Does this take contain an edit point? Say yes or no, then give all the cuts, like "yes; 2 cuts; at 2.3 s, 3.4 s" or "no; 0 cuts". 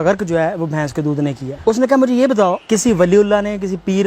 yes; 2 cuts; at 1.5 s, 2.6 s